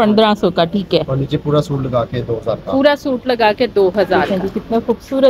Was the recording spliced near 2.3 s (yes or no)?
no